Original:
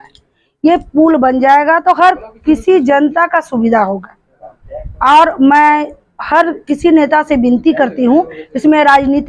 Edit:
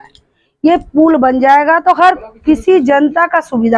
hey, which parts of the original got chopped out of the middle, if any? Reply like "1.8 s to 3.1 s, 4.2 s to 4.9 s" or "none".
none